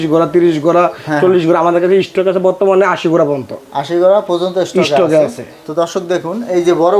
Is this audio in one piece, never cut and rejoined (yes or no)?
yes